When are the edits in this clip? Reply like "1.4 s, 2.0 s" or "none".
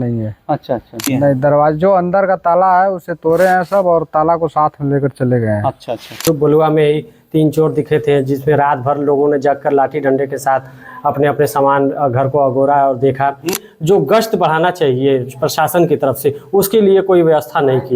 1.0 s, 6.2 s, 13.6 s